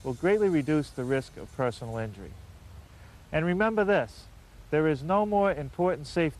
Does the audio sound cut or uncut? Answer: cut